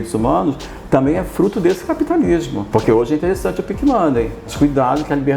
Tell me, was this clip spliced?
yes; 2 cuts; at 2.6 s, 4.4 s

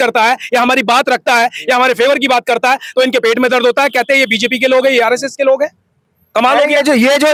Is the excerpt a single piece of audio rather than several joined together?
yes; 0 cuts

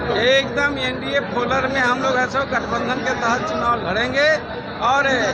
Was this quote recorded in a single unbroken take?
yes; 0 cuts

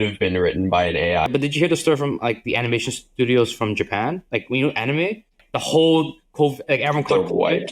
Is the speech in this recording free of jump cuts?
no; 2 cuts; at 1.3 s, 5.4 s

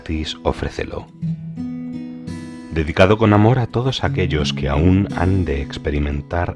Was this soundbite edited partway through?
no; 0 cuts

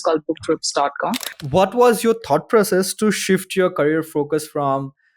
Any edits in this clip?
yes; 1 cut; at 1.3 s

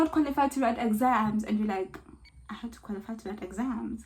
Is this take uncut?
yes; 0 cuts

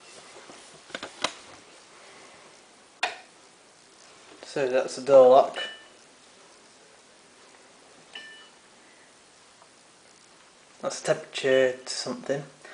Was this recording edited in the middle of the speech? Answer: no; 0 cuts

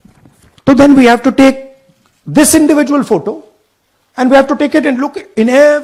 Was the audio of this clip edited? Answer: no; 0 cuts

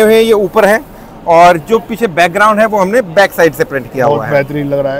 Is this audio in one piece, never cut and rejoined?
yes; 0 cuts

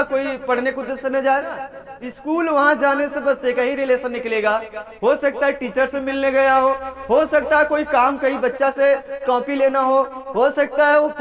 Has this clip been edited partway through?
yes; 1 cut; at 2.0 s

